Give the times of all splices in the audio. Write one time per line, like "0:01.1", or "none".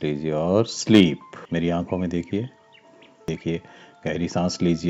0:01.3
0:03.3